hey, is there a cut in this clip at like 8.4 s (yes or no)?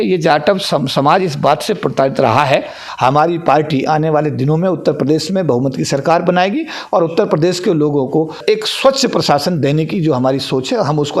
yes